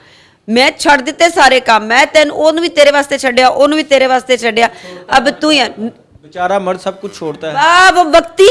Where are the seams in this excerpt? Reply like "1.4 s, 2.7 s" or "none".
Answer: none